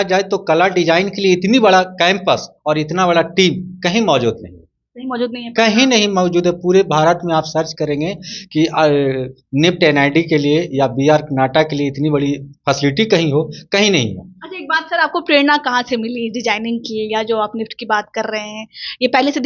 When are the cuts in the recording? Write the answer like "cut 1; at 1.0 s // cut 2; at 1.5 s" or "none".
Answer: none